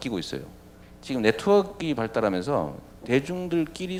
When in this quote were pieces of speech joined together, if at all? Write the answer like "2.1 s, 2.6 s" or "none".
none